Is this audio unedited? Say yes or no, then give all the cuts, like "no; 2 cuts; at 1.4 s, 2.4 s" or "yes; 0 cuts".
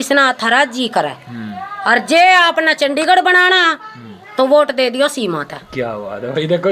yes; 0 cuts